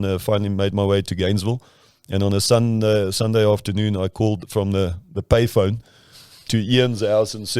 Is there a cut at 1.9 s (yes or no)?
no